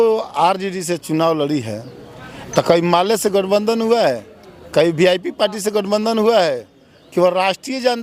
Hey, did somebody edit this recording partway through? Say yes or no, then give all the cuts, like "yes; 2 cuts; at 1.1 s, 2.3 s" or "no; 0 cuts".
no; 0 cuts